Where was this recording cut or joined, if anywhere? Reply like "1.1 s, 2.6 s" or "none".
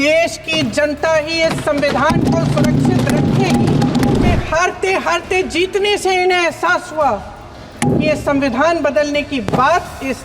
4.3 s

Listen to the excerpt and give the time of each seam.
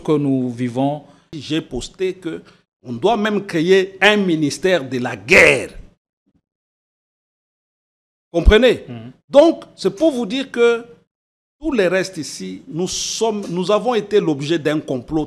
1.3 s

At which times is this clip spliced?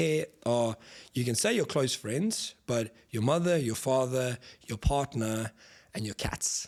none

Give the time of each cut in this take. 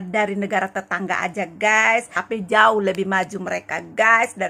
2.2 s

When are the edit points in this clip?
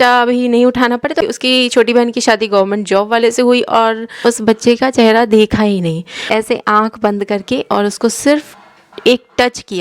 1.2 s, 4.2 s, 6.2 s

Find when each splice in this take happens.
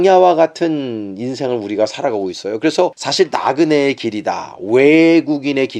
3.0 s

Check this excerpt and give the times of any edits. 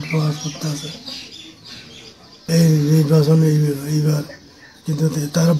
2.5 s

